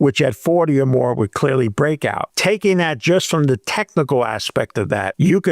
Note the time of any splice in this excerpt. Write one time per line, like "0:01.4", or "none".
0:04.5